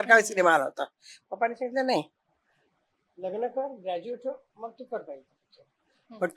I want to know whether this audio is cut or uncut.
uncut